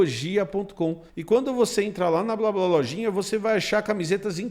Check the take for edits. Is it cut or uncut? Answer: cut